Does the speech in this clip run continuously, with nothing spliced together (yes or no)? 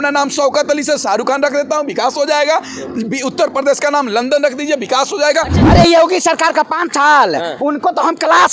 no